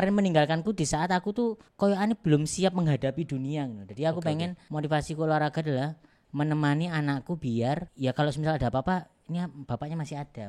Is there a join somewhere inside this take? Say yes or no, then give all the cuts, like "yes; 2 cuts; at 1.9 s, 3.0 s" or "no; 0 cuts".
no; 0 cuts